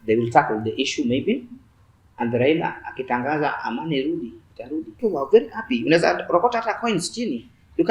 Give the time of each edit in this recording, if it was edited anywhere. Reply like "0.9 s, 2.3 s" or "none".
5.0 s